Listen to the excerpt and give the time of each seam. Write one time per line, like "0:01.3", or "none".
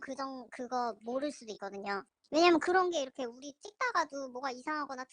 0:02.1